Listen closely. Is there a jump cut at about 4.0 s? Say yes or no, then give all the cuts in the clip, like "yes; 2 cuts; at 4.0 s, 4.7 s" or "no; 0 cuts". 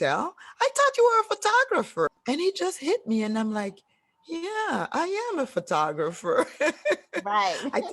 no; 1 cut; at 2.1 s